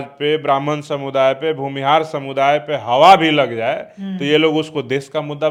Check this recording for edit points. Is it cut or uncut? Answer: uncut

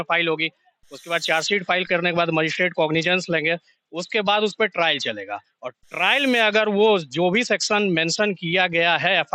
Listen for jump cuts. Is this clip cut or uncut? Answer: uncut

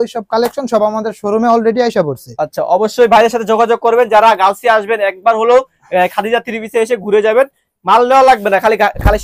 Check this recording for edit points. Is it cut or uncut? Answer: uncut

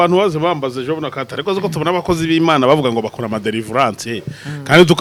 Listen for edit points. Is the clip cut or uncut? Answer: uncut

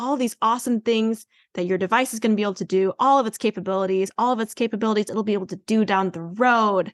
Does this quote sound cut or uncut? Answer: uncut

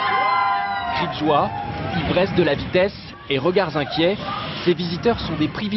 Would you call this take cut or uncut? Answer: uncut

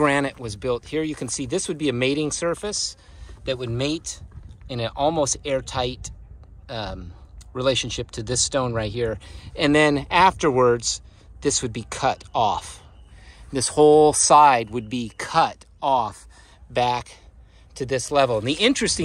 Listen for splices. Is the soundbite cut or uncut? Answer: uncut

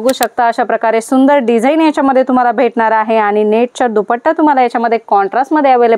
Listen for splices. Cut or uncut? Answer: uncut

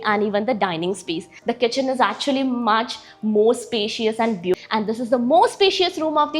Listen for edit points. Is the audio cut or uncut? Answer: cut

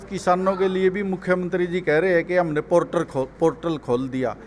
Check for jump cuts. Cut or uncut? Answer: uncut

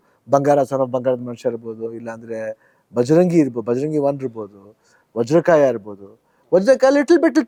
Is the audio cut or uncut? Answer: uncut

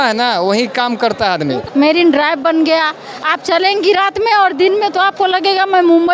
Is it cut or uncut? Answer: cut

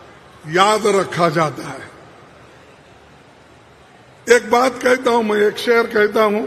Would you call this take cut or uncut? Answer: uncut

